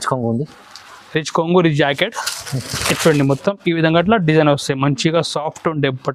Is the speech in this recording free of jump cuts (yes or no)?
yes